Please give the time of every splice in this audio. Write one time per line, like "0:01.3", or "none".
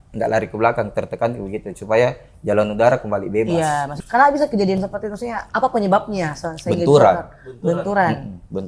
0:03.9
0:05.4